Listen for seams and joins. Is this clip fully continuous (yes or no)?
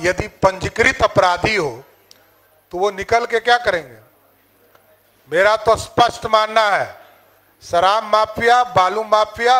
yes